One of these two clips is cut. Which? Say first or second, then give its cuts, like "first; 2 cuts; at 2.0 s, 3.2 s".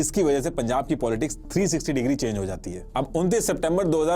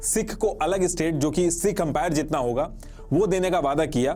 first; 1 cut; at 2.8 s